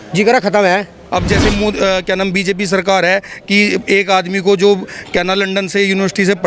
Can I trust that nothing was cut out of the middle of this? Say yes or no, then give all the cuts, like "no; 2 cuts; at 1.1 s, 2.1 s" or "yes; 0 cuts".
no; 1 cut; at 1.0 s